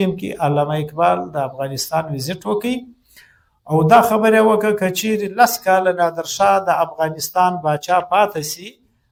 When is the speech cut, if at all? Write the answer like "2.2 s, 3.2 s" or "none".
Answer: none